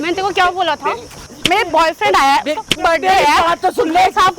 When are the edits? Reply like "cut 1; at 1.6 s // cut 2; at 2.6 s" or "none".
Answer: cut 1; at 1.3 s

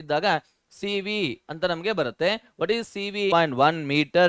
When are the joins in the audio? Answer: cut 1; at 3.3 s

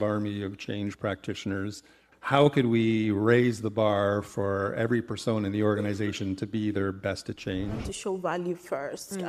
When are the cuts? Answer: cut 1; at 7.8 s

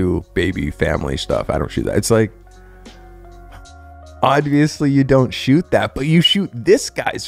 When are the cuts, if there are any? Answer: none

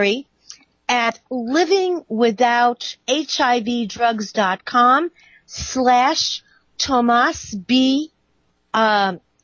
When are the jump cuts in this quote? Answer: none

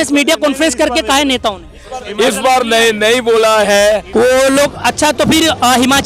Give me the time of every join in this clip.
cut 1; at 4.1 s

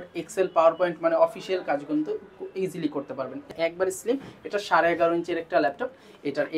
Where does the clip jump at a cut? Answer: cut 1; at 3.5 s

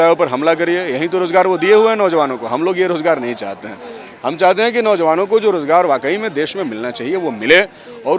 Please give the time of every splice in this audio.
none

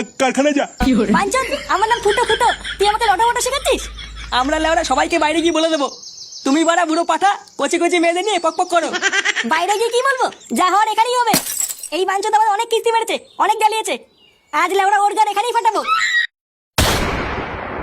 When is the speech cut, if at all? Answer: cut 1; at 16.5 s

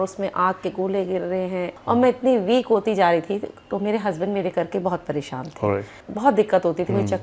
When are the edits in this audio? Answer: cut 1; at 1.7 s // cut 2; at 6.0 s

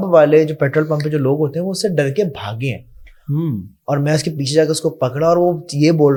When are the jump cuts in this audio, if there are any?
none

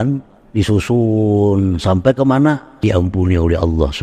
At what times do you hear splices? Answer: cut 1; at 2.8 s

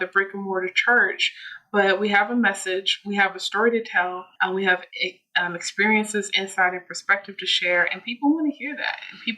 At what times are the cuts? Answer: cut 1; at 4.3 s

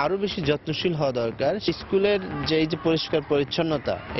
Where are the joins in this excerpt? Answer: cut 1; at 1.6 s

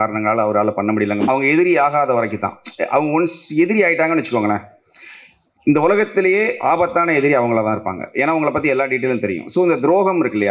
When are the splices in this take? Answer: cut 1; at 1.2 s

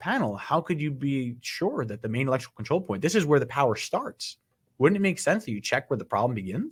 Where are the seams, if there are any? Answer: none

